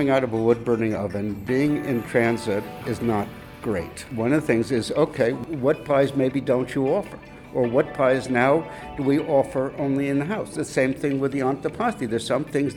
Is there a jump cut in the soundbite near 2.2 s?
no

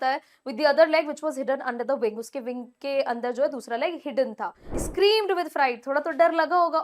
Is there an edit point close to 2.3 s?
no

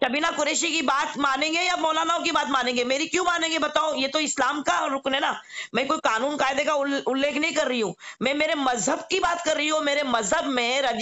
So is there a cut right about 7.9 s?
no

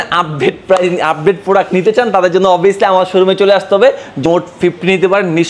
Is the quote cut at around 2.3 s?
no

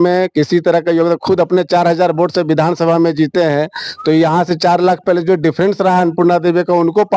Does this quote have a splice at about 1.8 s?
no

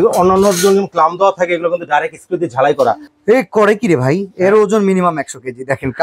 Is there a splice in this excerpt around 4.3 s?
no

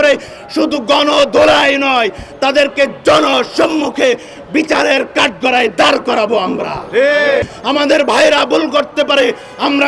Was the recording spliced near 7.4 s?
yes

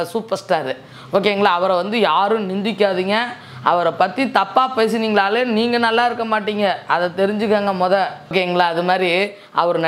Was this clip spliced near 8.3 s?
yes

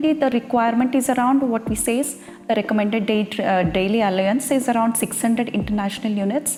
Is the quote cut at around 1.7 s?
no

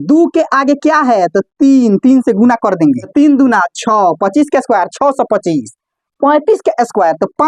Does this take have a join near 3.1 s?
yes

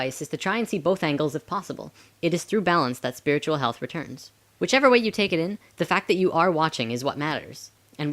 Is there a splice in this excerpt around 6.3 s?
no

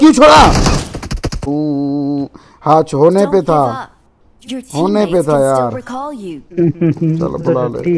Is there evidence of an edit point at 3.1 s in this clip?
no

